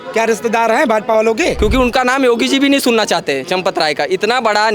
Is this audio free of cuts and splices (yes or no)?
no